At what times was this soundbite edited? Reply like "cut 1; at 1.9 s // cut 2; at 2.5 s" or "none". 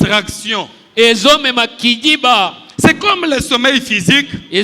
none